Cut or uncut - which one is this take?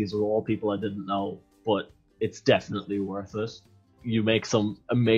uncut